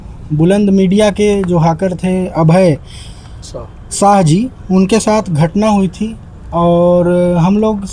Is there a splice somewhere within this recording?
no; 0 cuts

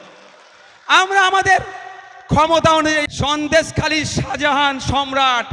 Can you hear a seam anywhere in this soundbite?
yes; 1 cut; at 3.1 s

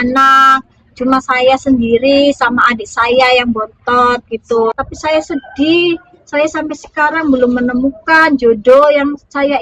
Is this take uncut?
no; 1 cut; at 4.8 s

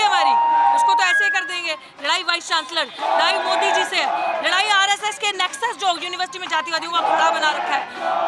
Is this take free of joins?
yes; 0 cuts

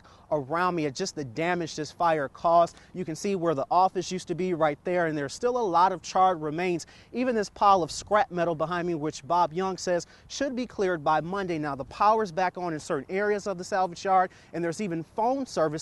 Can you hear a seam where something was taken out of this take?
no; 0 cuts

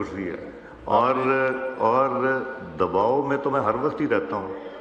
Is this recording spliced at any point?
no; 0 cuts

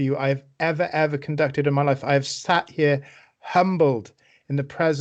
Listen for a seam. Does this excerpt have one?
no; 0 cuts

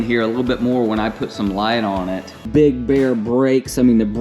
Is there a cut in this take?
yes; 1 cut; at 2.5 s

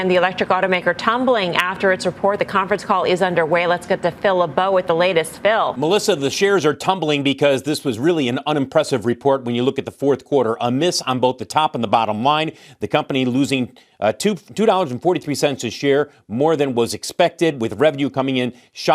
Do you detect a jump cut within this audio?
no; 0 cuts

